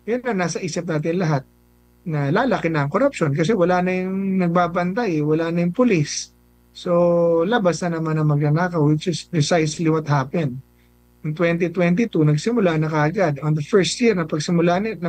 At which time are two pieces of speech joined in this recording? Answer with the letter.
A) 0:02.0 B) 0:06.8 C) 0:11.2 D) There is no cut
D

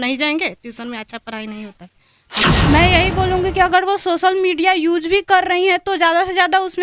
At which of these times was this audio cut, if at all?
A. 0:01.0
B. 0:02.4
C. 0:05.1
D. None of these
B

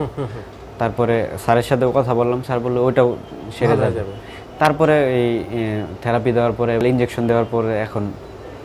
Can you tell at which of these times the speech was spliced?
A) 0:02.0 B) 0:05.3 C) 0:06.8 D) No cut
C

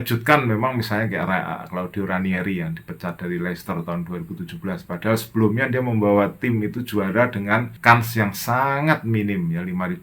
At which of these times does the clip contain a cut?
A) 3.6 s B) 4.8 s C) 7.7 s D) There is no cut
C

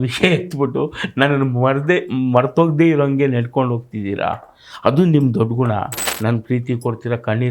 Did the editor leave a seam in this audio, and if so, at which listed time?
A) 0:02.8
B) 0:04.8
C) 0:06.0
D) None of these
C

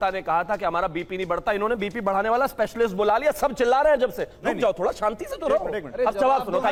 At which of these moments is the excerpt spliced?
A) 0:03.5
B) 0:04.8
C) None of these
C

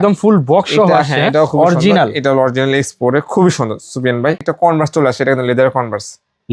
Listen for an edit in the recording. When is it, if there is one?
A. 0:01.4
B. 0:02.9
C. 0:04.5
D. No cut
C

